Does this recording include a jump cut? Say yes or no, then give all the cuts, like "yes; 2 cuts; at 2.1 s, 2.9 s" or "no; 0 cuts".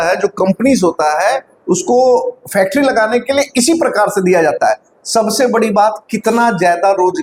no; 0 cuts